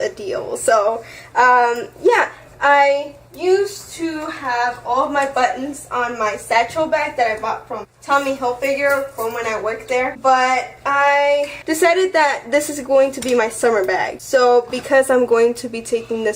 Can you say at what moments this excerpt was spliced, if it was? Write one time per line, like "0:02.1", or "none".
0:02.4